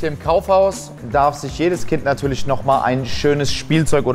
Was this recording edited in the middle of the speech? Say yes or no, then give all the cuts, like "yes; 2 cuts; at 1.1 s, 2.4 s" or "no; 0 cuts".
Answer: yes; 1 cut; at 0.9 s